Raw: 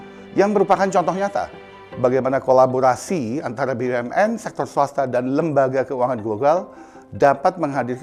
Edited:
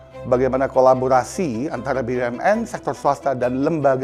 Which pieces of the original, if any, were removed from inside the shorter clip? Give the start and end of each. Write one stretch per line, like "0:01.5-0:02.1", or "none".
none